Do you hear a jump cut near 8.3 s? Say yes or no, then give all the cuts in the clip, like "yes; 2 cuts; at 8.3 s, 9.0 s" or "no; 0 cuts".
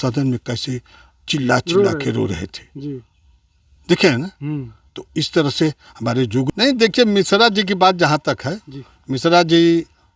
no; 1 cut; at 6.5 s